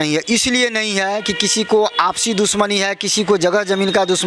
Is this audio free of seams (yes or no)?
yes